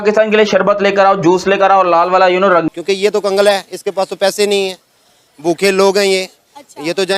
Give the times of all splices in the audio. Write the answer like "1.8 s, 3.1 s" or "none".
2.7 s